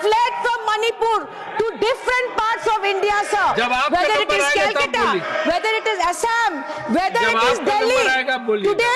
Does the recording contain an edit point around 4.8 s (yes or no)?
no